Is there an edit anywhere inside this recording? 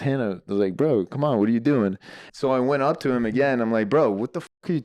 yes; 1 cut; at 2.0 s

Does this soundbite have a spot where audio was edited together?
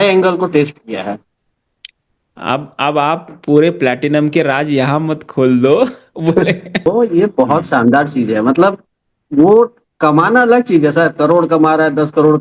no; 0 cuts

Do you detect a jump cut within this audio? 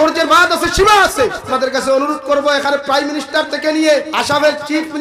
yes; 2 cuts; at 1.5 s, 4.1 s

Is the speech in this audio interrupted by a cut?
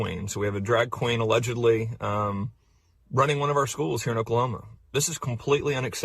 yes; 1 cut; at 2.6 s

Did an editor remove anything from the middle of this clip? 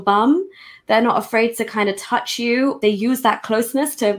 yes; 1 cut; at 2.8 s

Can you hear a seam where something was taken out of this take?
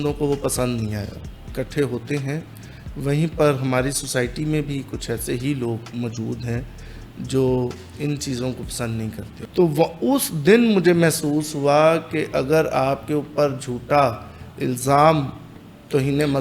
yes; 2 cuts; at 1.4 s, 9.3 s

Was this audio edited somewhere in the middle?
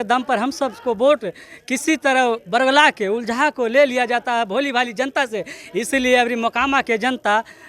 no; 0 cuts

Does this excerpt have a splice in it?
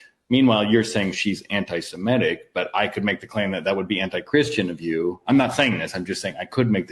no; 0 cuts

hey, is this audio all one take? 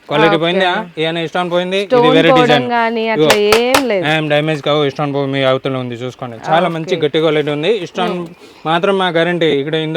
yes; 0 cuts

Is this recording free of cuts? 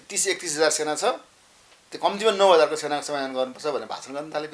yes; 0 cuts

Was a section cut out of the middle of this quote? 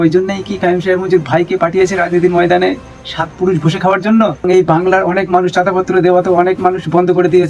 yes; 1 cut; at 4.5 s

